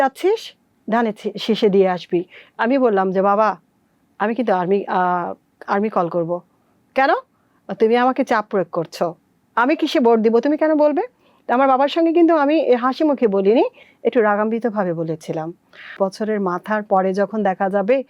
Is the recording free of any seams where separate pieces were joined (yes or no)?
no